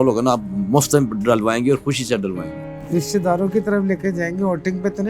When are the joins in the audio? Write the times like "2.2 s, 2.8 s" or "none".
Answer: 2.7 s